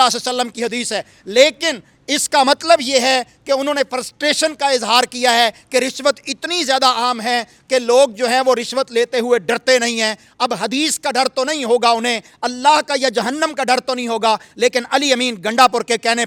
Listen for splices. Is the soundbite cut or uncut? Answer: uncut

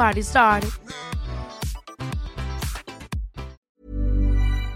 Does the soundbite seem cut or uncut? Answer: cut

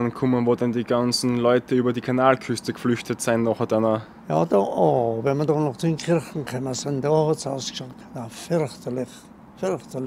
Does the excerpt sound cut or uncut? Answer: uncut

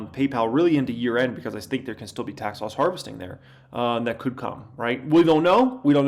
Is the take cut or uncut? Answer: uncut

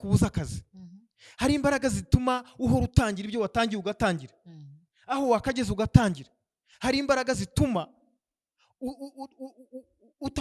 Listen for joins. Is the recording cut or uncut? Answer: uncut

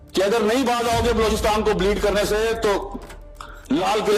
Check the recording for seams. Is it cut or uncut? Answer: uncut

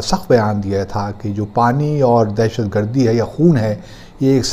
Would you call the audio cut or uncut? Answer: uncut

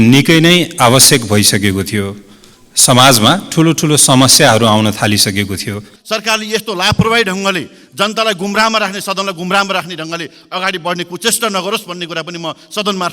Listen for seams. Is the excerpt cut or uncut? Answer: cut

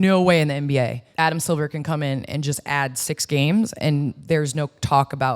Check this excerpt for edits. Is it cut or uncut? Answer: cut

